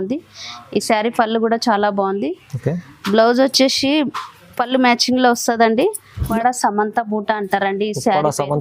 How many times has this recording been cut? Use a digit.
1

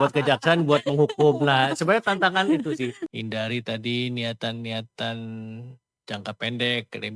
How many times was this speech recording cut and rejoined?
1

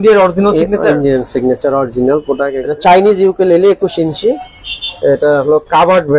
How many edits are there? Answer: 1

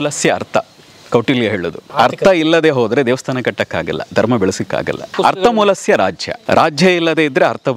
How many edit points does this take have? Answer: 3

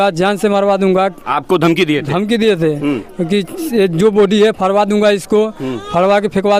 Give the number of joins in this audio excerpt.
0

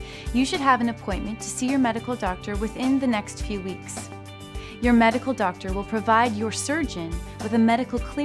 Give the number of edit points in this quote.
1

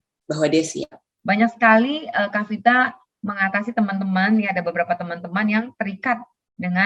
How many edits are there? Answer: 1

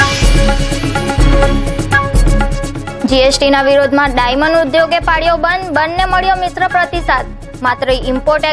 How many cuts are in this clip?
0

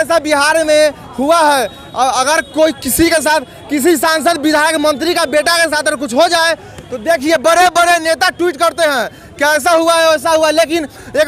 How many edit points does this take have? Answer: 0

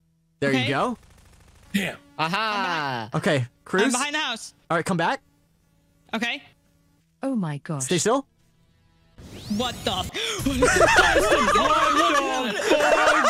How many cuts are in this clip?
1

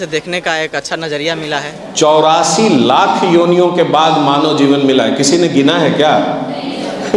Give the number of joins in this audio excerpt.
1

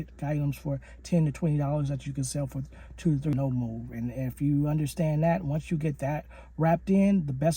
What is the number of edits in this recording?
1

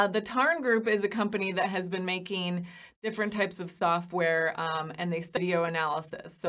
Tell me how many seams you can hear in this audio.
1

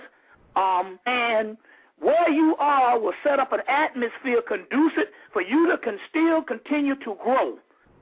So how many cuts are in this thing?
0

